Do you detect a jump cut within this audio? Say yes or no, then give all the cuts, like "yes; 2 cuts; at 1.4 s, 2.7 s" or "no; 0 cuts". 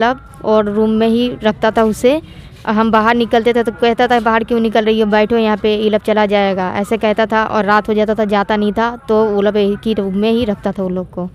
no; 0 cuts